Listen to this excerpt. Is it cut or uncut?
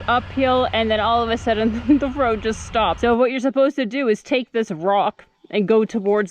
uncut